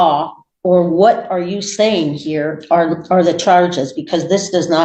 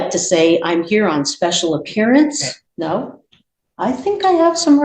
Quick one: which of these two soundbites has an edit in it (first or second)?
second